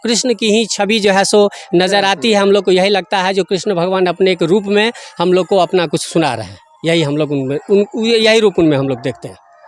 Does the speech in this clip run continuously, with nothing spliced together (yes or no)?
yes